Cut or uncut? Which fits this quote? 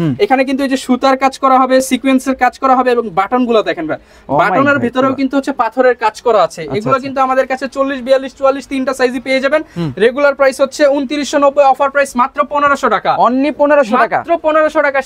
uncut